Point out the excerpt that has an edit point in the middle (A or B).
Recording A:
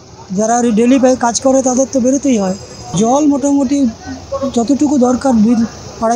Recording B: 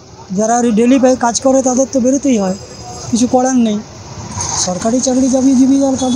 A